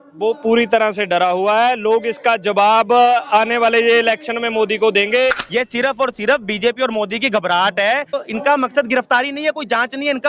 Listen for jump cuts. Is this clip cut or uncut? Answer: cut